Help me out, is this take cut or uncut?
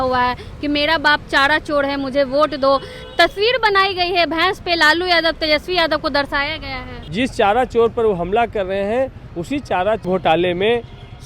cut